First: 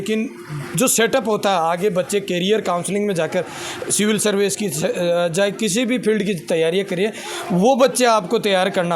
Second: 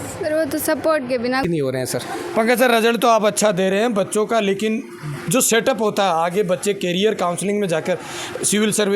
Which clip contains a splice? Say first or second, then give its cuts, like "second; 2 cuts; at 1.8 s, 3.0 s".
second; 1 cut; at 1.4 s